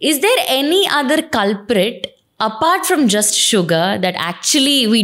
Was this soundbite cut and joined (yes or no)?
no